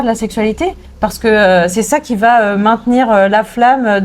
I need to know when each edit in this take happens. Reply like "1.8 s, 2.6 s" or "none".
none